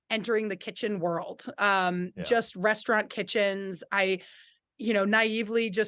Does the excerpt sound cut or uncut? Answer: uncut